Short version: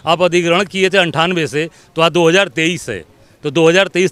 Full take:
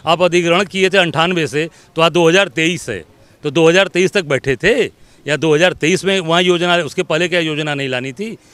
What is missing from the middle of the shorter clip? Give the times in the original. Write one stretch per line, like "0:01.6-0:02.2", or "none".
none